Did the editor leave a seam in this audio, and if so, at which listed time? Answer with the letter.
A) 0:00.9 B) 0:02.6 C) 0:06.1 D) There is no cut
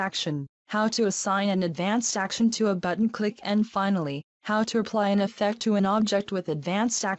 A